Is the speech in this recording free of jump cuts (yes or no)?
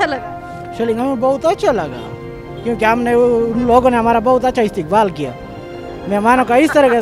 yes